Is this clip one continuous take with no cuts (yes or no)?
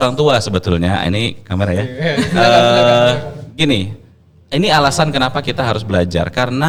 yes